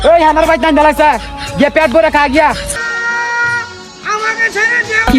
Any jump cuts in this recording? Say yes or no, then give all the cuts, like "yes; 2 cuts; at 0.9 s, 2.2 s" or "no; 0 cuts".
yes; 1 cut; at 2.7 s